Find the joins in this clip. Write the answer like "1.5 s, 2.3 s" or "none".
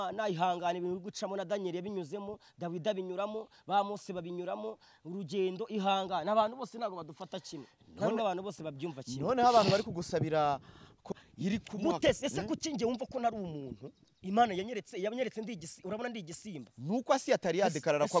11.1 s